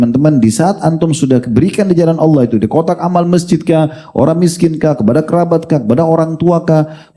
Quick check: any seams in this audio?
no; 0 cuts

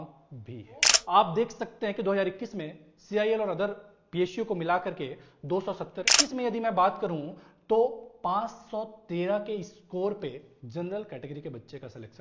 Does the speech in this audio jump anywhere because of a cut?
yes; 2 cuts; at 1.0 s, 6.2 s

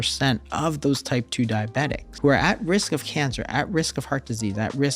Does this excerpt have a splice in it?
yes; 1 cut; at 2.1 s

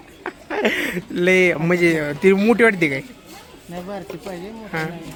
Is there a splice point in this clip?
no; 0 cuts

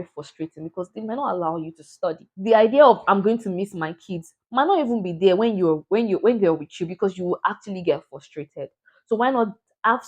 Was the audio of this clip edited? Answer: yes; 1 cut; at 2.3 s

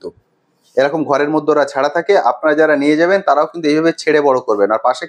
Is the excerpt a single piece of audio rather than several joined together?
yes; 0 cuts

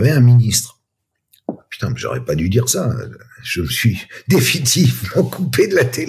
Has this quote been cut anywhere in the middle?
no; 0 cuts

